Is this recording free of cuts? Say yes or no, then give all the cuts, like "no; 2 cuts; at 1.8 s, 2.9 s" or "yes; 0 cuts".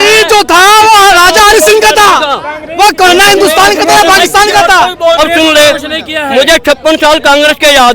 no; 1 cut; at 5.2 s